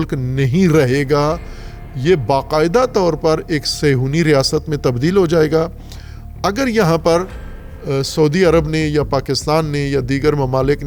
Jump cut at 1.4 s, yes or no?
no